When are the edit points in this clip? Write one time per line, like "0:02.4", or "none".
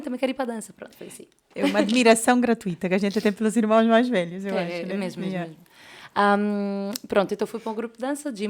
none